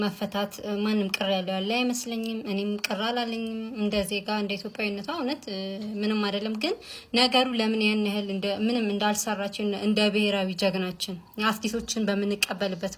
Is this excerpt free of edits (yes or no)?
yes